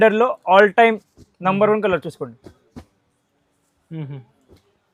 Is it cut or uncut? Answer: uncut